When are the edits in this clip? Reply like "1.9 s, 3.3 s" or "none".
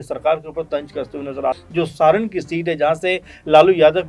1.6 s